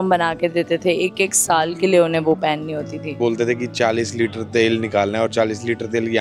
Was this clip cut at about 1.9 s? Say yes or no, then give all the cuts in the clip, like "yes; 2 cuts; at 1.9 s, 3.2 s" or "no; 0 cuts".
no; 1 cut; at 3.2 s